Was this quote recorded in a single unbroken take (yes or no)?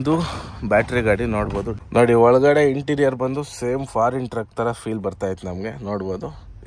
no